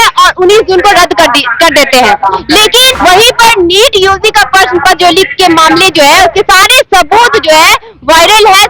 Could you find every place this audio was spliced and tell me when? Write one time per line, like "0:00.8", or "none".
0:03.0